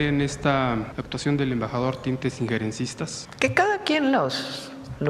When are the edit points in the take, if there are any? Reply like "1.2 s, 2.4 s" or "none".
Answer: 0.9 s, 3.2 s